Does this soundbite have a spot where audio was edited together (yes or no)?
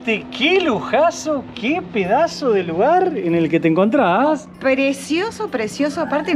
no